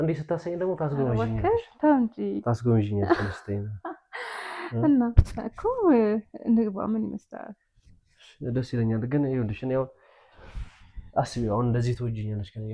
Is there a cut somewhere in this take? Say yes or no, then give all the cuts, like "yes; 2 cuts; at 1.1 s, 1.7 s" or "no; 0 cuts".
no; 0 cuts